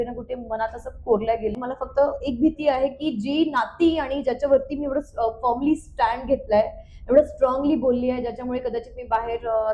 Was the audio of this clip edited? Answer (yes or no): yes